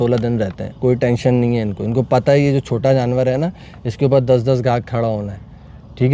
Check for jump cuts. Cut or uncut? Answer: uncut